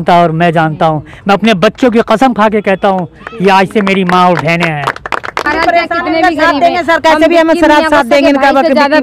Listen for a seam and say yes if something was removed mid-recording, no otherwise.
yes